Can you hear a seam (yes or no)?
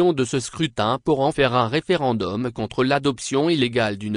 no